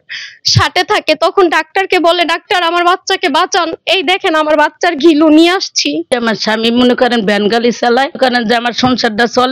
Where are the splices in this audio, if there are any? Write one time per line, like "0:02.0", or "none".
0:06.1